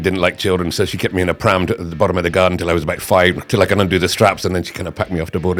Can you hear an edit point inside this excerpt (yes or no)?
no